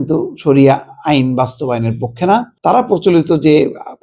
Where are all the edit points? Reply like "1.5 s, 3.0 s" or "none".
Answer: 2.5 s